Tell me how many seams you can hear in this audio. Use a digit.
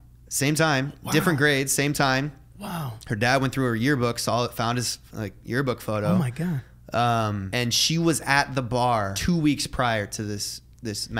2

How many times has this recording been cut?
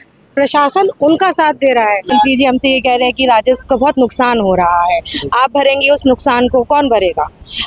1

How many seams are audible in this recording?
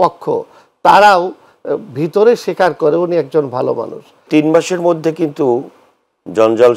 1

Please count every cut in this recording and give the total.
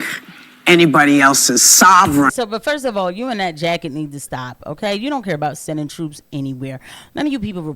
1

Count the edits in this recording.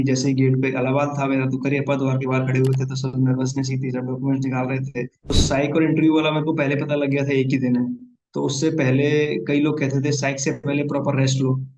1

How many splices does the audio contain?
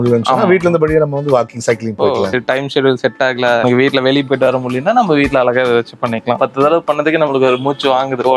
2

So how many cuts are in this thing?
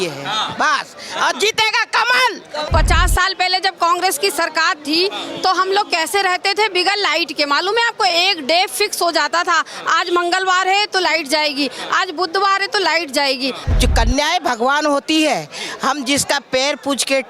2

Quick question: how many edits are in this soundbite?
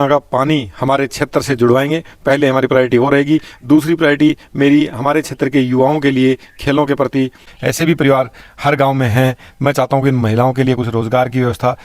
1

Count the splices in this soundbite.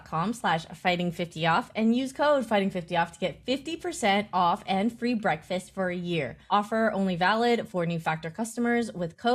0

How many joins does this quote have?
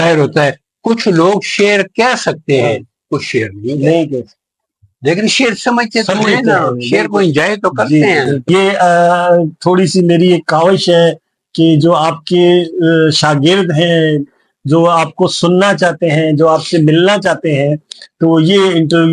1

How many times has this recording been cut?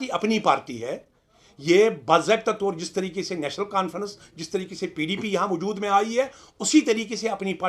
0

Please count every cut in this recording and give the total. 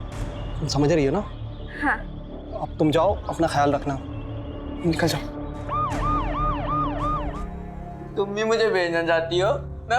1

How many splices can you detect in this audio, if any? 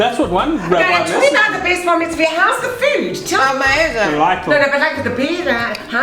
0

